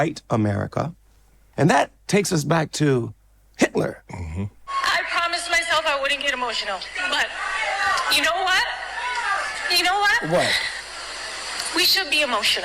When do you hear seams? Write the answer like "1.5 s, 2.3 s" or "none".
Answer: 1.4 s, 4.7 s